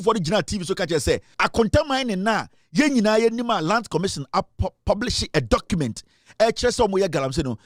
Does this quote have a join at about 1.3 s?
yes; 1 cut; at 1.3 s

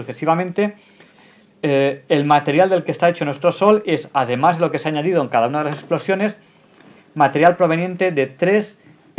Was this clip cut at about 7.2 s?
yes; 1 cut; at 7.2 s

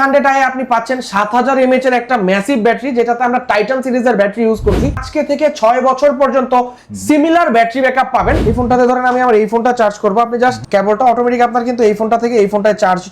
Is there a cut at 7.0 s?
no; 2 cuts; at 4.9 s, 8.5 s

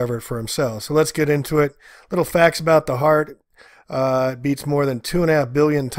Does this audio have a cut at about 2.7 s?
yes; 1 cut; at 2.7 s

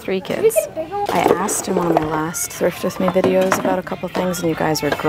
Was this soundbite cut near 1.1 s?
yes; 1 cut; at 1.1 s

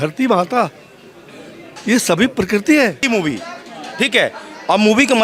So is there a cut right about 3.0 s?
yes; 1 cut; at 3.0 s

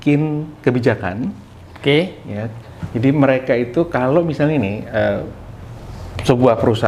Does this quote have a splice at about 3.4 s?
no; 0 cuts

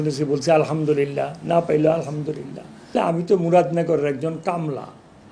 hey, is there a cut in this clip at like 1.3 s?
no; 1 cut; at 2.9 s

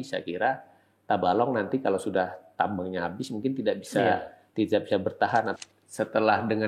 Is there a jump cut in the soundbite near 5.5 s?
yes; 1 cut; at 5.5 s

